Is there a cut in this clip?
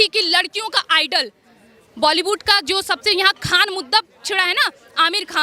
no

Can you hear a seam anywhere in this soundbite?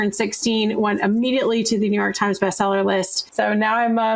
yes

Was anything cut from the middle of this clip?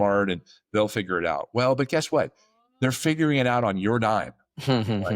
no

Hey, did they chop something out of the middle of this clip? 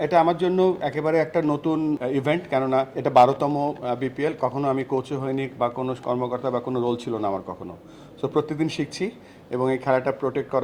yes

